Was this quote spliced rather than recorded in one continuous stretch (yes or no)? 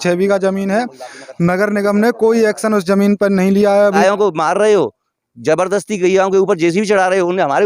yes